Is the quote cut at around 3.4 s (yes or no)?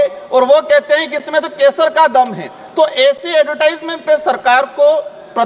no